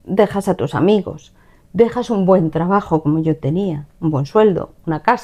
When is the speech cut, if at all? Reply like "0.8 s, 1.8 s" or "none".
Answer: none